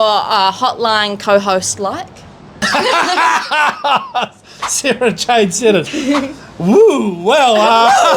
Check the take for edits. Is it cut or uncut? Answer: cut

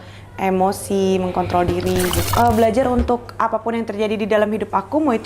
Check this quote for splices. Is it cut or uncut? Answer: cut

